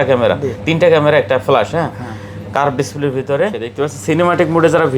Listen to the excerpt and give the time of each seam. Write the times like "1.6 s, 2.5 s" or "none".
3.6 s

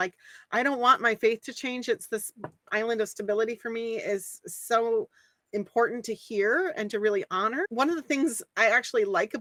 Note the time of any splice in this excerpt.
none

